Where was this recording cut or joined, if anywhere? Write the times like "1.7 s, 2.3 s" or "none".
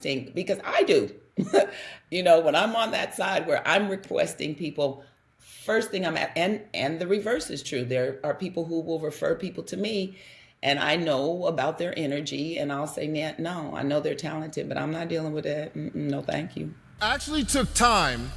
16.9 s

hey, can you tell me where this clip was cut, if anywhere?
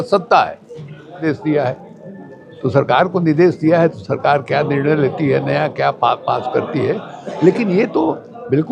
1.2 s

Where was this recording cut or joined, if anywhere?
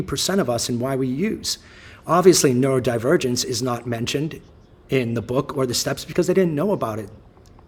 none

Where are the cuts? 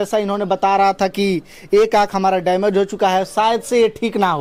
none

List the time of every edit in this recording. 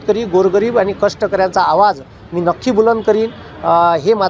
none

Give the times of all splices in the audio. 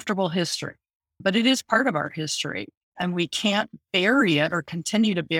1.2 s, 2.9 s

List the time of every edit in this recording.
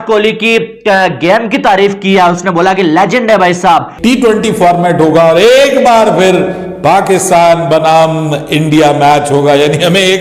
3.9 s

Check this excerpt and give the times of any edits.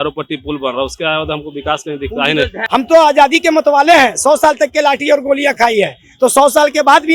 2.6 s

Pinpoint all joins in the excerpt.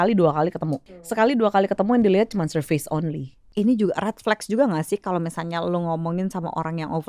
1.1 s, 3.4 s

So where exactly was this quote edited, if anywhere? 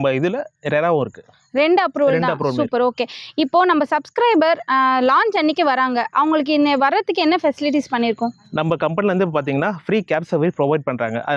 none

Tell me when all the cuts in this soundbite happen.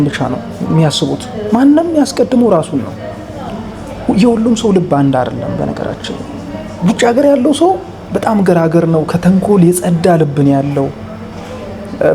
3.5 s

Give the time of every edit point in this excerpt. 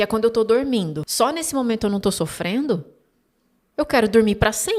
1.0 s

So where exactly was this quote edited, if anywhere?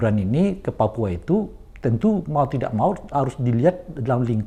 none

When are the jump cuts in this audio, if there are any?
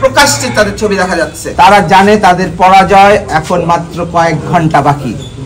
1.4 s

